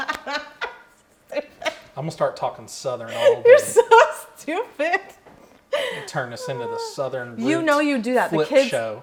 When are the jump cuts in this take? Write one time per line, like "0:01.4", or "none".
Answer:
none